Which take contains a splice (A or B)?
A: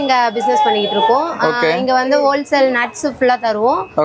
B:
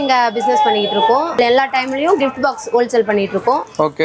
B